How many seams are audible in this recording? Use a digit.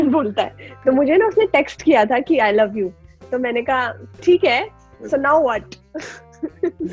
0